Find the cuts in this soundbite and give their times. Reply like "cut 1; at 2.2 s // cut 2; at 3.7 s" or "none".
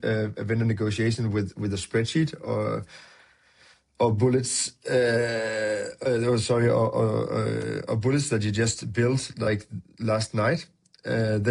none